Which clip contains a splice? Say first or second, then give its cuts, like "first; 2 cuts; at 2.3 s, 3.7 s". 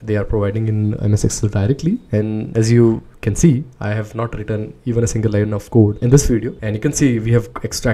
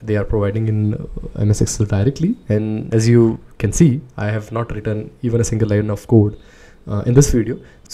first; 2 cuts; at 1.0 s, 6.5 s